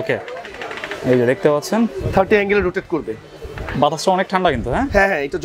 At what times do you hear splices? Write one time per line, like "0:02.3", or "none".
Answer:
none